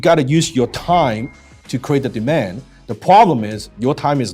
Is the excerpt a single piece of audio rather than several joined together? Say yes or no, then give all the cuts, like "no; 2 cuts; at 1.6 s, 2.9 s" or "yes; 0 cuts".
yes; 0 cuts